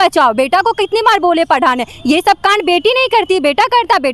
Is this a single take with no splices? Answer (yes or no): yes